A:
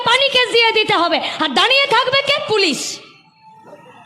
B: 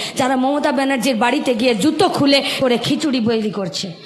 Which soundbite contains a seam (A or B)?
B